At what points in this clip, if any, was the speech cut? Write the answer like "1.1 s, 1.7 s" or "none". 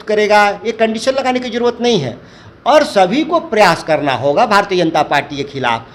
none